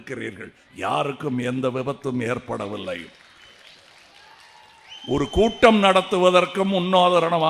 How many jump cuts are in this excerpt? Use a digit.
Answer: 0